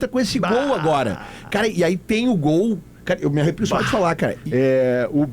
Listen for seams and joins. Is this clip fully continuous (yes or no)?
no